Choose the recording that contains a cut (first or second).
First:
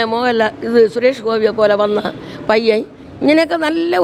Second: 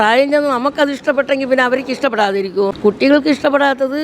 second